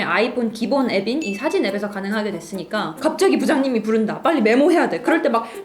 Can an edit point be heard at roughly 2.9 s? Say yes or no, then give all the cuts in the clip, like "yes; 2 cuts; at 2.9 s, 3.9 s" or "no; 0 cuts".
yes; 1 cut; at 2.9 s